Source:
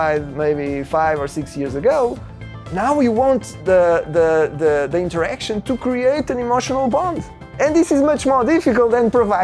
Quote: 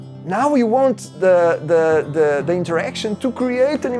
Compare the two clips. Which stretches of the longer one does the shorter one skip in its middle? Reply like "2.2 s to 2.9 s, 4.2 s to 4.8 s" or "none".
none